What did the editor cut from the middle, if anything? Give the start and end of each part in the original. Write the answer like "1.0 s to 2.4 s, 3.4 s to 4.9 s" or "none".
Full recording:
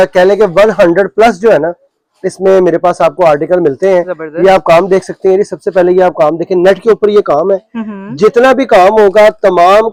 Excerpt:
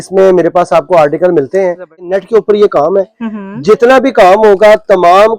4.4 s to 6.6 s